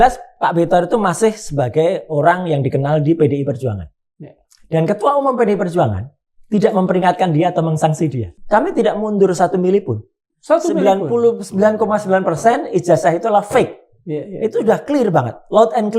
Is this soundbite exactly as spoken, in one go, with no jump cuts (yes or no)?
no